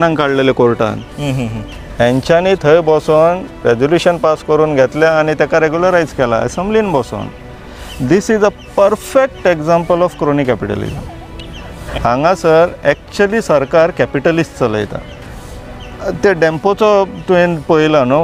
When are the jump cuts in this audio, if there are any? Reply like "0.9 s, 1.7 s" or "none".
11.8 s

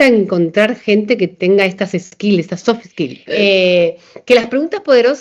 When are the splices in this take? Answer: 1.3 s, 3.2 s

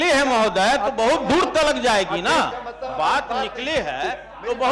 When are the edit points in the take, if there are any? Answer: none

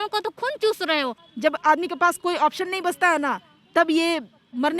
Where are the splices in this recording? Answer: 1.2 s

